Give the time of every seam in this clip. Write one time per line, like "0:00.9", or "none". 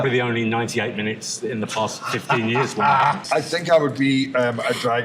0:03.2